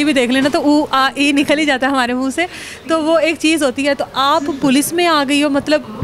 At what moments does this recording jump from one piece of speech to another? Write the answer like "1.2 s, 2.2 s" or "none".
none

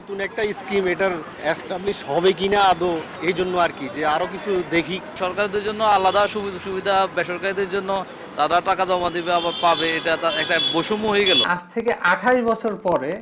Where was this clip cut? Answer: 1.3 s, 3.1 s, 5.1 s, 11.5 s

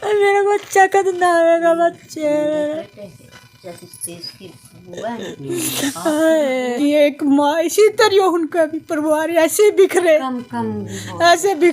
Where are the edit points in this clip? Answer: 6.7 s

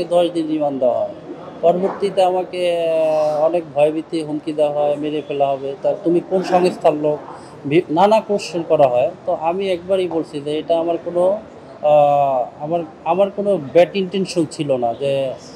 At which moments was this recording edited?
none

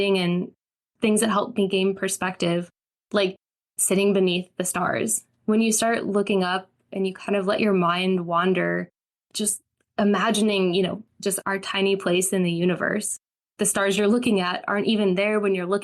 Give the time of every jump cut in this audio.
11.0 s

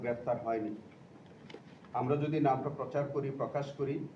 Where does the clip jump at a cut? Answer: none

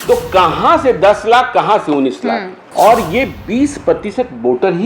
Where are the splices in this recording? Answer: 2.6 s

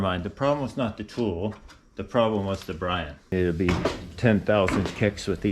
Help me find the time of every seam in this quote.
3.3 s

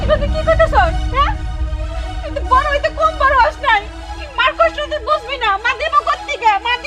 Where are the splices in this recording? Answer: none

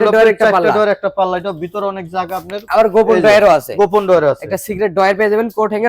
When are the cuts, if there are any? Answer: 2.6 s

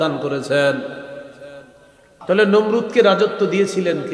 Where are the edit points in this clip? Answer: 2.1 s

